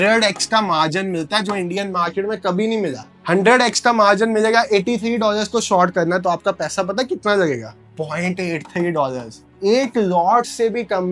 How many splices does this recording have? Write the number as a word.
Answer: zero